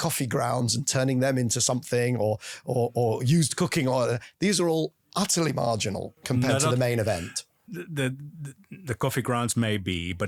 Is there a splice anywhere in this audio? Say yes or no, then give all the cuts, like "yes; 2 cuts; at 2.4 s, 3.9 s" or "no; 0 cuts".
no; 0 cuts